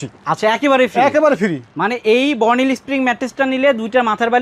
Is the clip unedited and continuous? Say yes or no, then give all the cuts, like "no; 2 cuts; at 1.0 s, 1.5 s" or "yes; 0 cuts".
yes; 0 cuts